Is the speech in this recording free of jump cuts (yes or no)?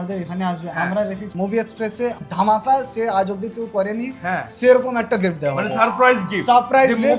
no